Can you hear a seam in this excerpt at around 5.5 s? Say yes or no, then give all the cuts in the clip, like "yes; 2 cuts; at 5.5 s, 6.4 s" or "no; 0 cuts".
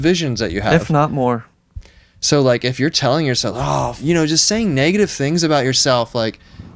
no; 1 cut; at 4.0 s